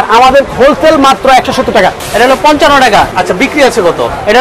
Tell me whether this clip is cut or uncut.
cut